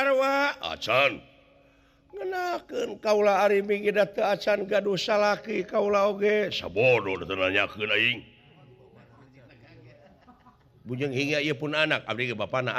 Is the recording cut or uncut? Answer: uncut